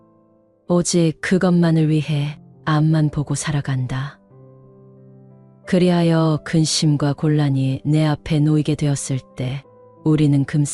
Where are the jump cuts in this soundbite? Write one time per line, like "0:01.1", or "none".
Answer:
0:04.2
0:05.7